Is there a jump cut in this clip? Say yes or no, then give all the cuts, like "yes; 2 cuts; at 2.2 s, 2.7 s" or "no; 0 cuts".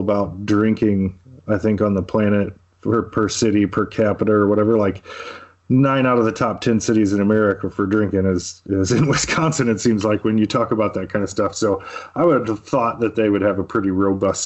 no; 0 cuts